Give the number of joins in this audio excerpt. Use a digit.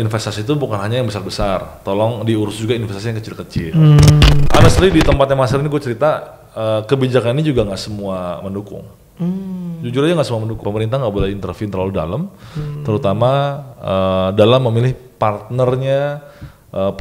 2